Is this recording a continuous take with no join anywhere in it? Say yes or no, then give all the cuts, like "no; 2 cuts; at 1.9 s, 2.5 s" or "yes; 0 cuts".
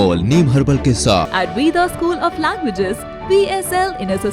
no; 1 cut; at 1.3 s